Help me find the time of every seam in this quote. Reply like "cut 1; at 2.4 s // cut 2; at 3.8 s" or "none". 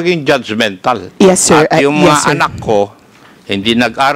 cut 1; at 1.1 s